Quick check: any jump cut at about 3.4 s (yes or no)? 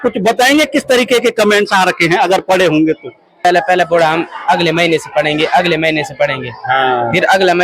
yes